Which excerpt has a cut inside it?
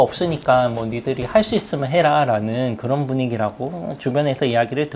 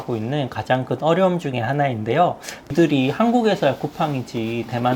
second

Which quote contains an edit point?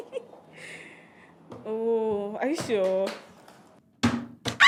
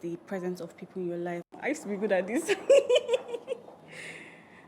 second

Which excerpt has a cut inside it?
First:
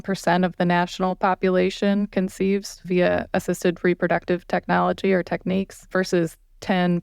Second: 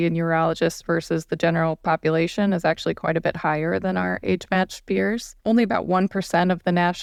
first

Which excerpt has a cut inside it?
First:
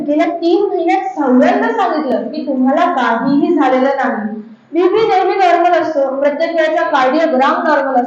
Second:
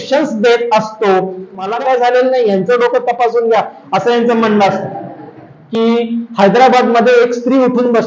second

